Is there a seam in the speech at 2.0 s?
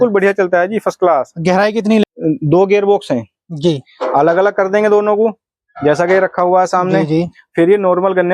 yes; 1 cut; at 2.0 s

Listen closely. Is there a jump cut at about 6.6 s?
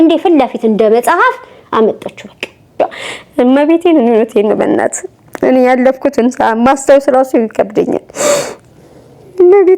no; 1 cut; at 2.8 s

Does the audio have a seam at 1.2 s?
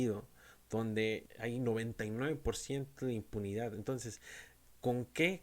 yes; 1 cut; at 1.2 s

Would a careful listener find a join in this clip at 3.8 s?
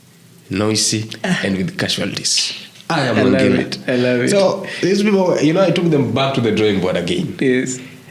no; 0 cuts

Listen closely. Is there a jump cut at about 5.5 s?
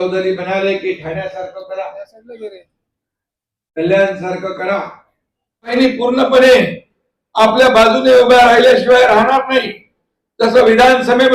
yes; 1 cut; at 5.5 s

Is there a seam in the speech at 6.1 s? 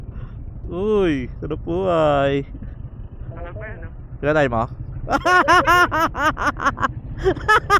no; 0 cuts

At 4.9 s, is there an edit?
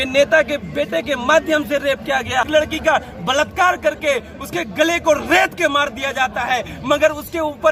no; 1 cut; at 2.4 s

